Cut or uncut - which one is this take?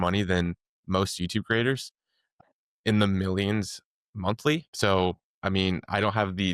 cut